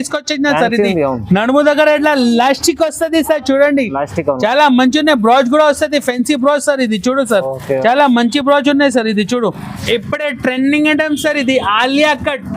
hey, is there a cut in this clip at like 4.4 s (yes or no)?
no